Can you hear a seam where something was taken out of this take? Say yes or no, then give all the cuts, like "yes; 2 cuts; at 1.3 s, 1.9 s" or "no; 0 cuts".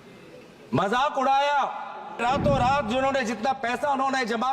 yes; 1 cut; at 2.2 s